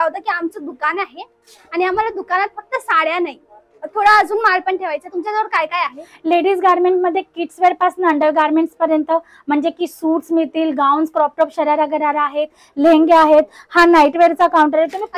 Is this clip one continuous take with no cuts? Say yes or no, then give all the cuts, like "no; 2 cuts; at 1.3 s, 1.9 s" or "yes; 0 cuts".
yes; 0 cuts